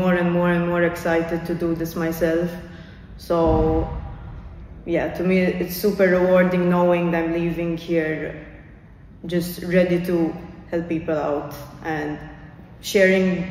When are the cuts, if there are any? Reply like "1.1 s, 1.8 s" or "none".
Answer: none